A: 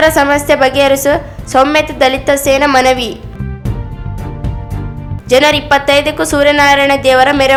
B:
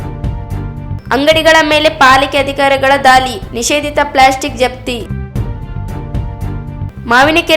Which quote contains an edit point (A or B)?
B